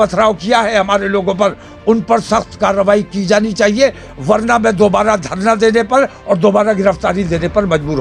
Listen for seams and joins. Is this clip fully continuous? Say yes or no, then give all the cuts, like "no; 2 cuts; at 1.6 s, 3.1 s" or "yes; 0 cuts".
yes; 0 cuts